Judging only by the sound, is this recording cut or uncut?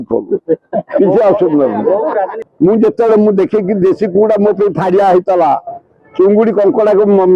cut